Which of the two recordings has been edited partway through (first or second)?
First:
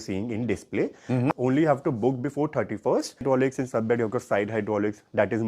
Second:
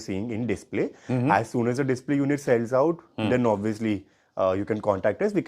first